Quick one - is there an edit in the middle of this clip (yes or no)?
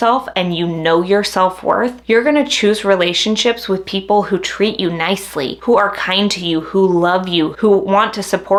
no